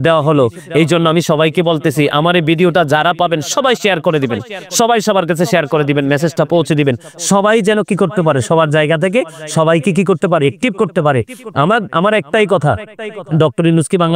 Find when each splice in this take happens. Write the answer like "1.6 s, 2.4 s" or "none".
none